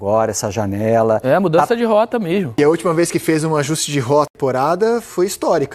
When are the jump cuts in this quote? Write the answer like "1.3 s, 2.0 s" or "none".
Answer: 2.6 s, 4.3 s